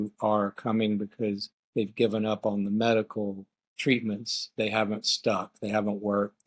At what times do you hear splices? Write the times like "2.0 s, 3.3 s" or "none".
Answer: 1.5 s